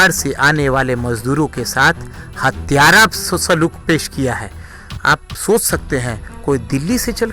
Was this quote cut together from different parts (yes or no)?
no